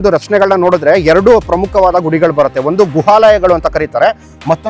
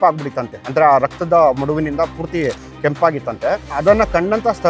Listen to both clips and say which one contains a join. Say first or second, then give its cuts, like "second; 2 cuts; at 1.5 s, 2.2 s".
second; 1 cut; at 3.8 s